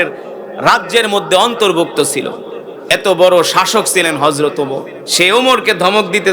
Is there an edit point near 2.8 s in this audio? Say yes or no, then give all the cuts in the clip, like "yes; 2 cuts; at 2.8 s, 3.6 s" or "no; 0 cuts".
no; 1 cut; at 5.0 s